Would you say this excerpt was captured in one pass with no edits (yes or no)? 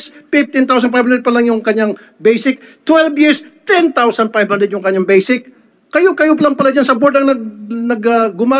yes